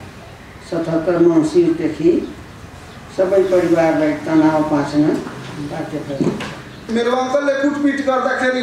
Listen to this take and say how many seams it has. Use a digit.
1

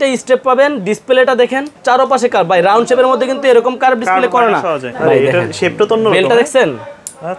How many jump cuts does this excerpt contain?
2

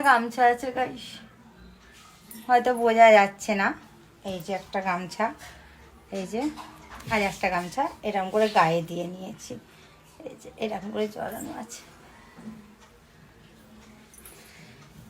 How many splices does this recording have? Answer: 0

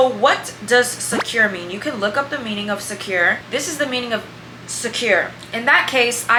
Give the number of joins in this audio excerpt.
0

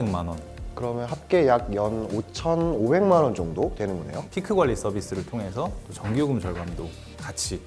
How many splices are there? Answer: 1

